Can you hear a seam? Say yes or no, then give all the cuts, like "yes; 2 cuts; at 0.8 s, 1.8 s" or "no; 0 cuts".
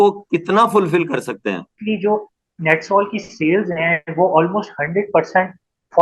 yes; 1 cut; at 1.7 s